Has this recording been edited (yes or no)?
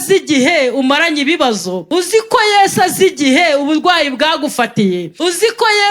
yes